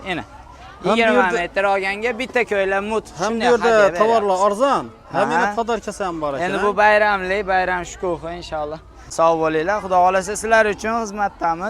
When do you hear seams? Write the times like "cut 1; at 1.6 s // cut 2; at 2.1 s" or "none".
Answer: cut 1; at 9.1 s